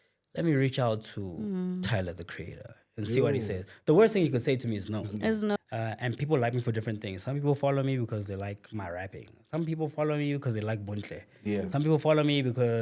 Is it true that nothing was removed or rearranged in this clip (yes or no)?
no